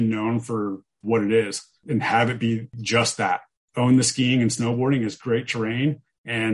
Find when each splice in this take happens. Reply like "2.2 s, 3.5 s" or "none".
1.8 s, 3.1 s